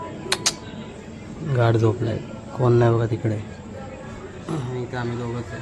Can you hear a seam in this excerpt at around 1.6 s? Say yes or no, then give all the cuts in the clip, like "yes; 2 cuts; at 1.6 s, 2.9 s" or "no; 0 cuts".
no; 0 cuts